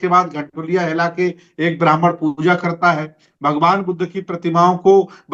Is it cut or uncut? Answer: uncut